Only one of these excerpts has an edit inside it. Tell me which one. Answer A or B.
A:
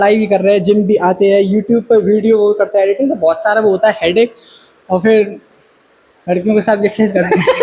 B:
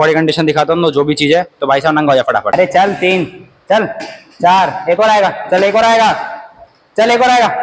B